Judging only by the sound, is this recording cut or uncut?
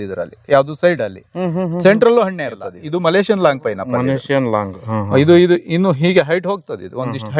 cut